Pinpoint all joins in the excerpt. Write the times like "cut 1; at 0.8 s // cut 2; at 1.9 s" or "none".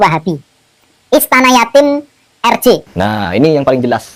cut 1; at 2.9 s